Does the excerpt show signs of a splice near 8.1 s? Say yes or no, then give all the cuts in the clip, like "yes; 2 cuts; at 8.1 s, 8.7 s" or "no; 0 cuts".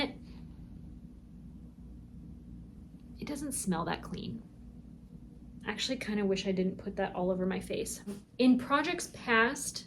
yes; 1 cut; at 8.1 s